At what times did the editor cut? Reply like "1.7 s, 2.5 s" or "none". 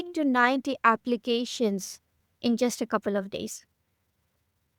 none